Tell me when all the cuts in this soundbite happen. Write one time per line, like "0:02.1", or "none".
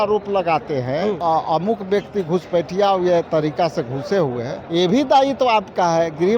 0:01.2
0:03.3
0:04.6